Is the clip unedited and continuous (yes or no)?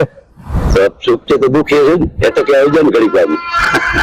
yes